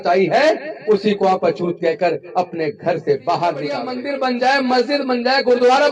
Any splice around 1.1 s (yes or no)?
no